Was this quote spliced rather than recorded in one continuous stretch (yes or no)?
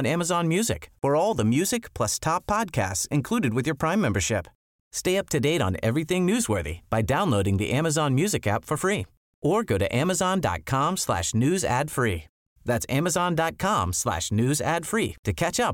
no